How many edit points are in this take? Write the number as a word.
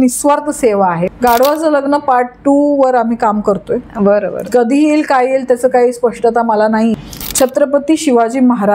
two